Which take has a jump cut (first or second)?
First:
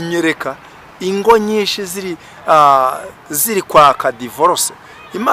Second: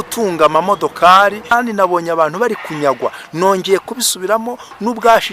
second